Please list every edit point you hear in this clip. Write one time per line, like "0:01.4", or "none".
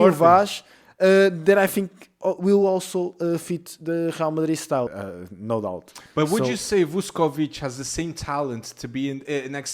0:04.9